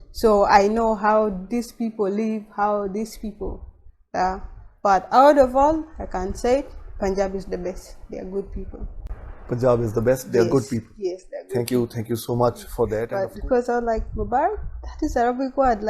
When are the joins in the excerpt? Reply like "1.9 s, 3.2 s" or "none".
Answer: 13.0 s